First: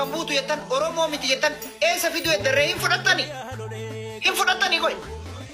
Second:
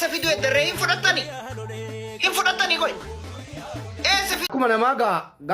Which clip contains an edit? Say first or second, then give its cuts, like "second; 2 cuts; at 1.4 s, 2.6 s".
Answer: second; 1 cut; at 4.5 s